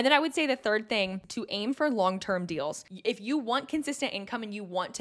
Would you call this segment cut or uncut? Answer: cut